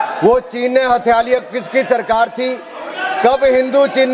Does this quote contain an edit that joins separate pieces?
no; 0 cuts

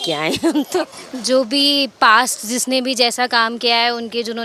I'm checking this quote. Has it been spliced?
yes; 1 cut; at 0.9 s

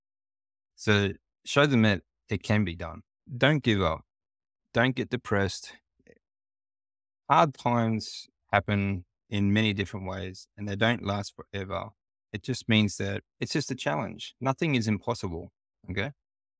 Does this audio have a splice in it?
yes; 3 cuts; at 3.3 s, 6.0 s, 13.3 s

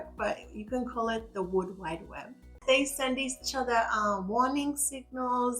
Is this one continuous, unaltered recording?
no; 1 cut; at 2.6 s

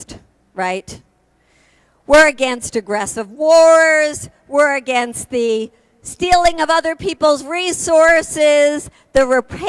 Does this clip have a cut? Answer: yes; 1 cut; at 1.4 s

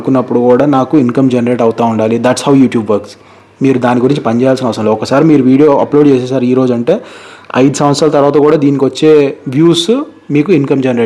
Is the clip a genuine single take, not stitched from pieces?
yes; 0 cuts

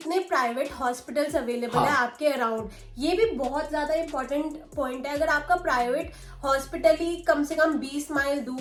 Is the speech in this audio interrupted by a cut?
no; 0 cuts

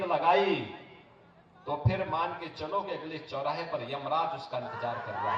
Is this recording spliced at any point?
no; 0 cuts

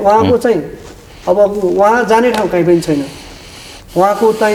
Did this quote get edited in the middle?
no; 0 cuts

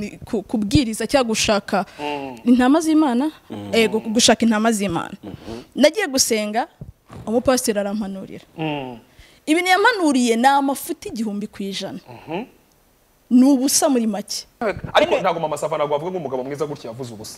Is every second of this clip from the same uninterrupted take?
no; 1 cut; at 14.6 s

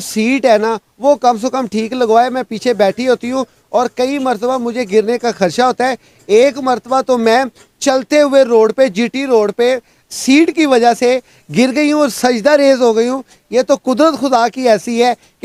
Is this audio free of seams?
yes; 0 cuts

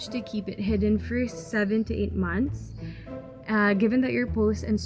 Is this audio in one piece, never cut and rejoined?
yes; 0 cuts

